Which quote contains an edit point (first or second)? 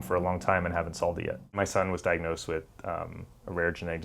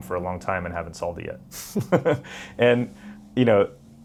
first